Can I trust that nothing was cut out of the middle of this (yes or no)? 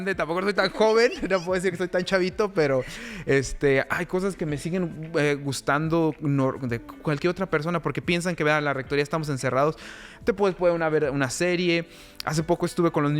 yes